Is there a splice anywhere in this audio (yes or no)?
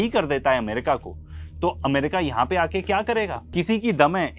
yes